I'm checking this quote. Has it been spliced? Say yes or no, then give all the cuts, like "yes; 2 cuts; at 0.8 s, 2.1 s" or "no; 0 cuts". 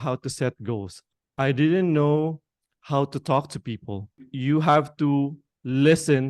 yes; 2 cuts; at 0.9 s, 4.3 s